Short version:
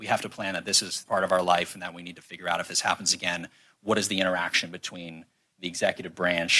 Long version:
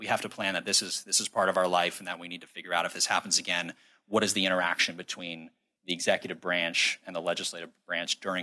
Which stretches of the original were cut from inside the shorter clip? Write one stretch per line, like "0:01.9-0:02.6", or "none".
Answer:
0:00.9-0:01.2